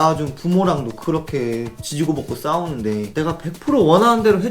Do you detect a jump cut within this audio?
yes; 1 cut; at 3.1 s

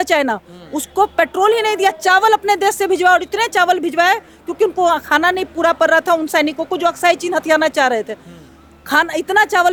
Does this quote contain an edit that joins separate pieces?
no; 0 cuts

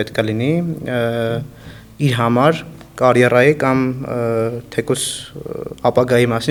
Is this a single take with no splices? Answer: yes; 0 cuts

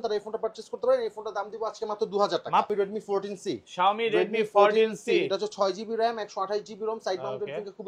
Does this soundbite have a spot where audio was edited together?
yes; 1 cut; at 2.7 s

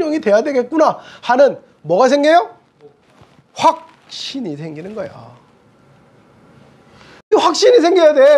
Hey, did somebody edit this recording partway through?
yes; 1 cut; at 7.3 s

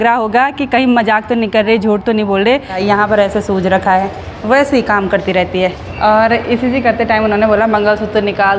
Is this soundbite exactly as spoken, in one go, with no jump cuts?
no; 2 cuts; at 2.7 s, 5.9 s

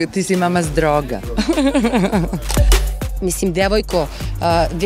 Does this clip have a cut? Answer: yes; 1 cut; at 2.9 s

